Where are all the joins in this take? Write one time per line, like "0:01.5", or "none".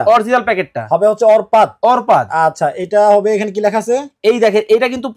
none